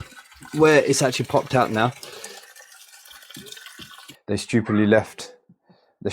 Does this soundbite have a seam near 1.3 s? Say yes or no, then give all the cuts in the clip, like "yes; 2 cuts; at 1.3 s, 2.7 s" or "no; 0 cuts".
no; 1 cut; at 4.1 s